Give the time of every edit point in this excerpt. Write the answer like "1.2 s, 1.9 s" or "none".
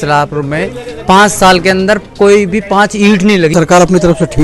3.5 s